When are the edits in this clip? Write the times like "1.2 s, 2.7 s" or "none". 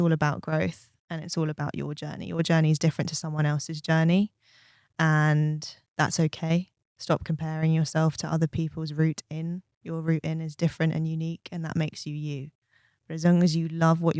none